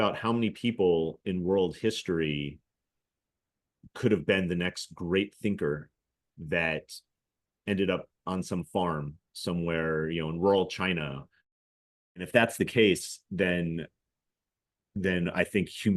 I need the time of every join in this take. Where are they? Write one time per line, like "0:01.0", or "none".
0:11.5